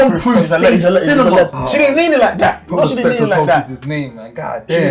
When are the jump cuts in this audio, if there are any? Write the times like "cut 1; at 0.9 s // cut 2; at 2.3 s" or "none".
cut 1; at 1.6 s

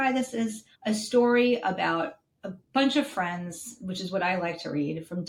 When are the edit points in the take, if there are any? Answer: none

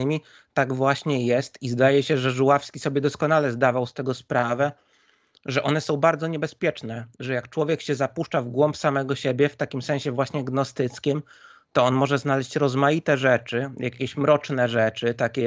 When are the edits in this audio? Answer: none

